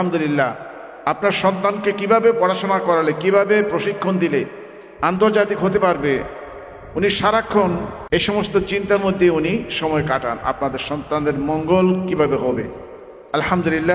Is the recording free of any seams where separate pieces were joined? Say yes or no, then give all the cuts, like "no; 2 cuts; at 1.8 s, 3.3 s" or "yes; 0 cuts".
no; 1 cut; at 7.9 s